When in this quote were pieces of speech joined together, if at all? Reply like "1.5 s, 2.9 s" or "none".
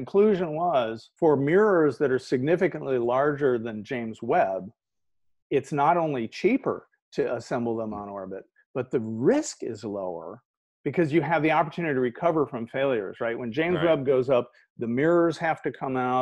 1.0 s